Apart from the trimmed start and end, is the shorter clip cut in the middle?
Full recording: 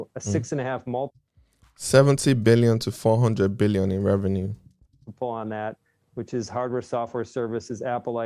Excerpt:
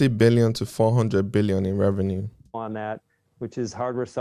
yes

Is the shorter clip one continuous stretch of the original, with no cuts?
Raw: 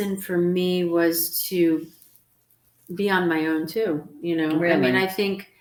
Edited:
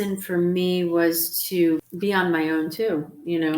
no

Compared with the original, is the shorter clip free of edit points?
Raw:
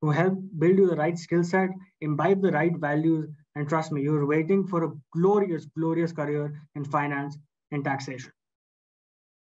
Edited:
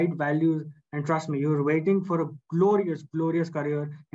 yes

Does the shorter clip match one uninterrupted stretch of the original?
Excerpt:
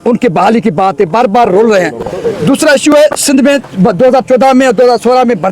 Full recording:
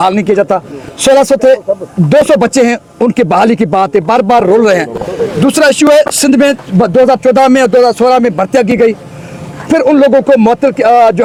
yes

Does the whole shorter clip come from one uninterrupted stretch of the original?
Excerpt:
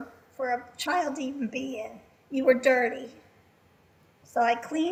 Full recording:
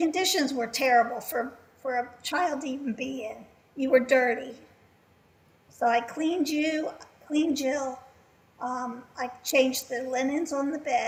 yes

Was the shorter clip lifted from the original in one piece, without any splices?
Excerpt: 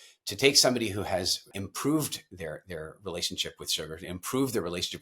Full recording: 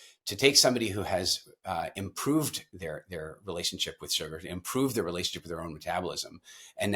no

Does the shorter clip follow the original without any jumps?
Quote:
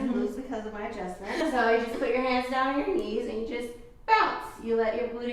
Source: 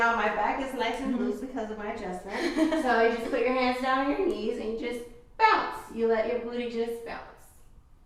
no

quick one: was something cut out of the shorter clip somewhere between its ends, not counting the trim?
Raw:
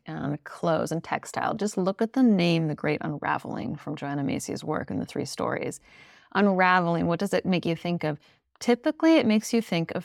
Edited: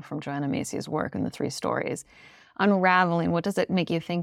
no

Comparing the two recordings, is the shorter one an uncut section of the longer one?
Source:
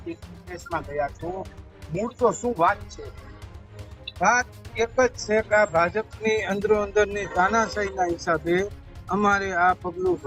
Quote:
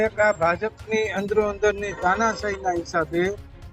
yes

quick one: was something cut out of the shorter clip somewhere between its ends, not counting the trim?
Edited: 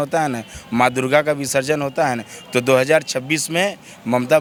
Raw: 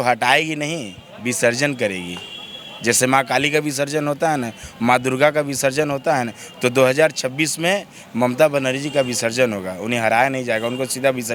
no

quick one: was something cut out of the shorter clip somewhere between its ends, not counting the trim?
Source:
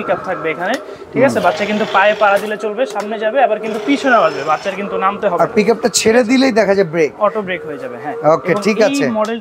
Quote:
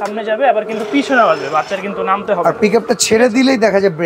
no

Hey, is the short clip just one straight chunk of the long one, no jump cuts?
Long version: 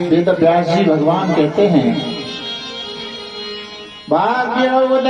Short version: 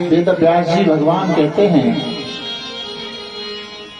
yes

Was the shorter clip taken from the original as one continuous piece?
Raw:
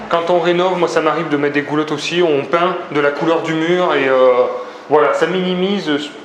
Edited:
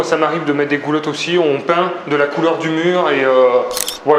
yes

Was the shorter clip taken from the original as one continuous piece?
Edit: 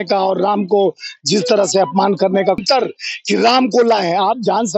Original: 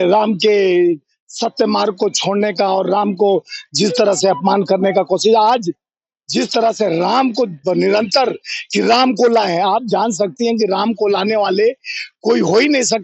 no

